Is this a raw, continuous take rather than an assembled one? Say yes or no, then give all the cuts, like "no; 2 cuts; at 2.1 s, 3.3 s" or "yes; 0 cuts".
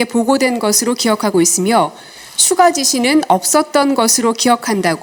yes; 0 cuts